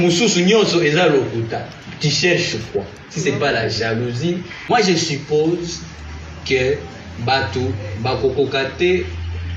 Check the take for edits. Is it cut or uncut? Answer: cut